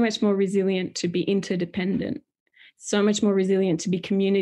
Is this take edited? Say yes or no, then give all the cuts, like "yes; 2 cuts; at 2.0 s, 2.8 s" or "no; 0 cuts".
no; 0 cuts